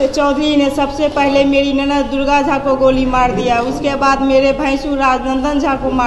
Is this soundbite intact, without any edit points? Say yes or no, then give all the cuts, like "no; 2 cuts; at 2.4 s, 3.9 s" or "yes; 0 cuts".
yes; 0 cuts